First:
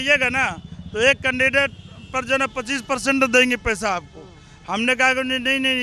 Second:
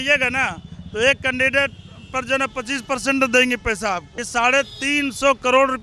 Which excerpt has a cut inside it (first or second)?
second